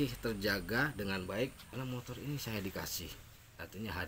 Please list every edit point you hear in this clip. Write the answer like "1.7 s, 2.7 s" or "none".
1.7 s